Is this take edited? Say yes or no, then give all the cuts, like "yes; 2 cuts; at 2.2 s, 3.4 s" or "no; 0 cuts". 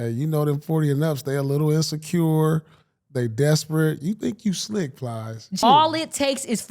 yes; 1 cut; at 5.6 s